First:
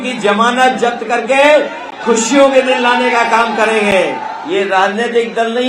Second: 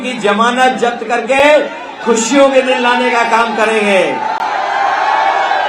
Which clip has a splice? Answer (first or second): first